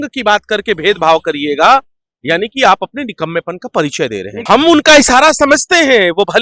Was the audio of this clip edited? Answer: yes; 1 cut; at 4.3 s

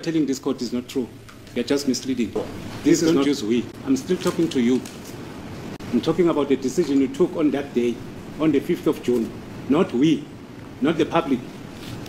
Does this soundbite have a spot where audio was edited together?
yes; 1 cut; at 3.3 s

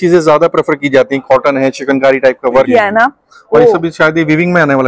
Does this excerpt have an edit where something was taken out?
yes; 1 cut; at 2.7 s

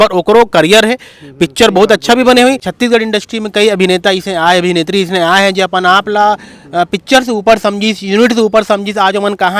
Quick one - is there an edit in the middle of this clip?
yes; 1 cut; at 2.7 s

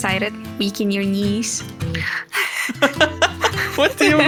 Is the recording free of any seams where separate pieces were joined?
yes; 0 cuts

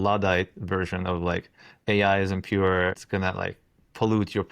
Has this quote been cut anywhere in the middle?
yes; 2 cuts; at 1.7 s, 3.0 s

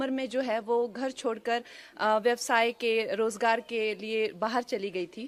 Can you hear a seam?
no; 0 cuts

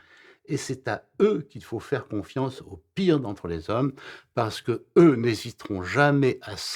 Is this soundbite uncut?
yes; 0 cuts

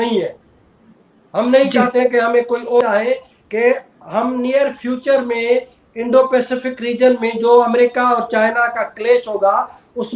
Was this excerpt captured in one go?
no; 1 cut; at 2.8 s

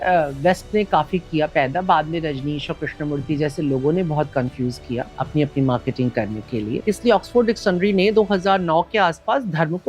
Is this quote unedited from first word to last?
no; 2 cuts; at 5.2 s, 6.8 s

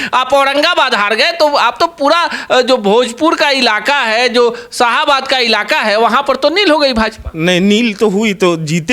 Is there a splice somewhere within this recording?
no; 0 cuts

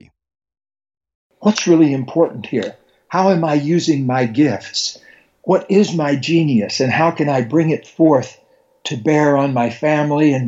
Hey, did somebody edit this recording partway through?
yes; 1 cut; at 1.2 s

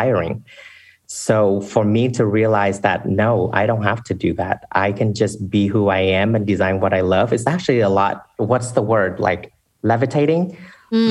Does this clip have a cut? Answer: yes; 1 cut; at 8.3 s

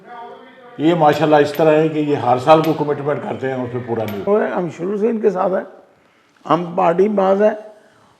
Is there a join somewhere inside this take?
yes; 1 cut; at 4.3 s

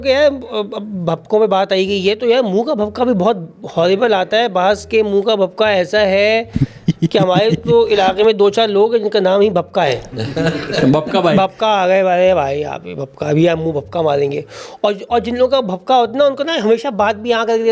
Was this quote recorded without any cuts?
yes; 0 cuts

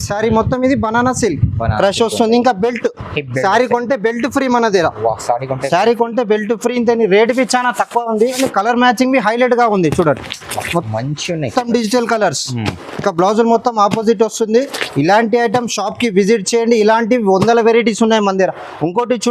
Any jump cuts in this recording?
no; 0 cuts

